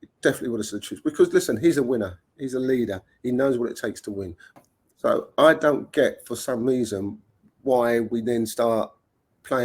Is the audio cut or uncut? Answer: cut